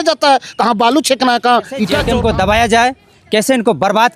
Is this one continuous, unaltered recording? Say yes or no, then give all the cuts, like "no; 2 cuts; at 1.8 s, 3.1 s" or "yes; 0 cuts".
no; 1 cut; at 2.0 s